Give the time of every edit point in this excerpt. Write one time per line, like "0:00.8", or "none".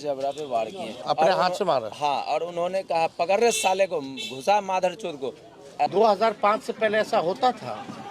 0:00.9
0:05.9